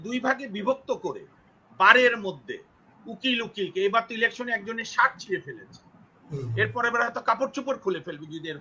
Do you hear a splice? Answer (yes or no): no